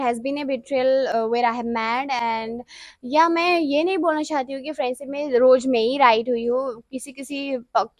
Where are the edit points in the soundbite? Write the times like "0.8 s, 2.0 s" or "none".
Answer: none

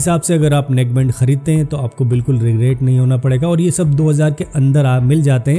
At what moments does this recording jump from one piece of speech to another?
none

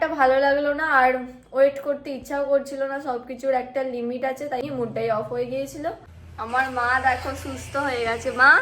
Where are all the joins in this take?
4.6 s, 6.1 s

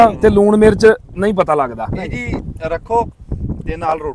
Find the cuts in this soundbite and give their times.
none

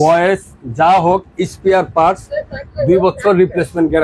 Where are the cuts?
none

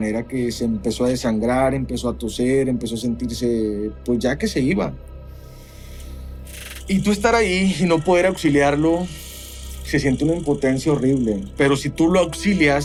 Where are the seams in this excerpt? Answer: none

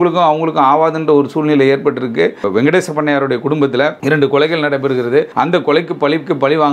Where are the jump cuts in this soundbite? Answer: 2.5 s, 4.0 s, 5.3 s

